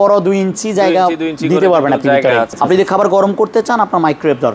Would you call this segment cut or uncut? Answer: cut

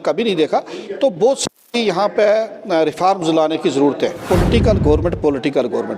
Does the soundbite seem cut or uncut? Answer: cut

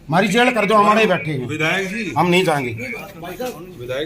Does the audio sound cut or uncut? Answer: uncut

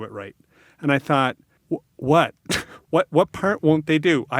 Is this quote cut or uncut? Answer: cut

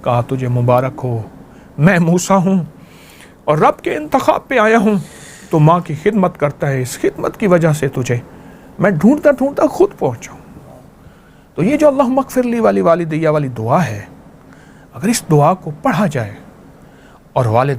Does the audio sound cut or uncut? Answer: uncut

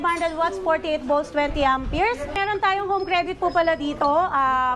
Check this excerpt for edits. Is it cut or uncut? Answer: cut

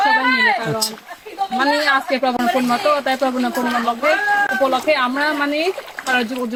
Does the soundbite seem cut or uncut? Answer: uncut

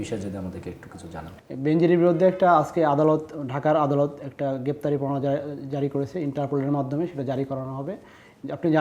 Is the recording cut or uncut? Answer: uncut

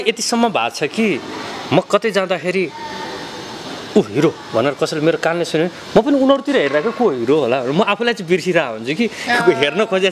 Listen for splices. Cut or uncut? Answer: uncut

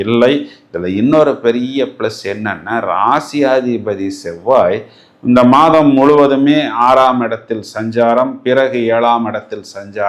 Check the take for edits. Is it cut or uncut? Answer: uncut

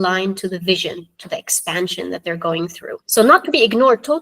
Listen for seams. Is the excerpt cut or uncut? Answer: cut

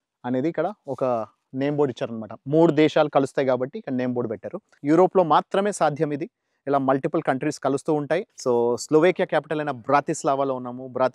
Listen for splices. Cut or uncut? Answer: cut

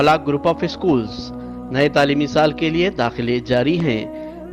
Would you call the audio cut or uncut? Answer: uncut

